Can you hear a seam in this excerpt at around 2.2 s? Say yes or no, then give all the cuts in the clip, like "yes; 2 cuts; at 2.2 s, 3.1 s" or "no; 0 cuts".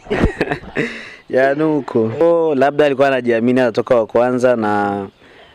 yes; 1 cut; at 2.2 s